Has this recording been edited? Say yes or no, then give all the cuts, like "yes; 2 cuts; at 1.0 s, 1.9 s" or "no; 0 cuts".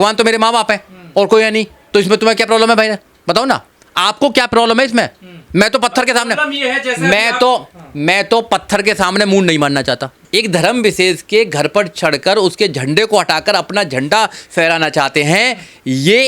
yes; 1 cut; at 10.1 s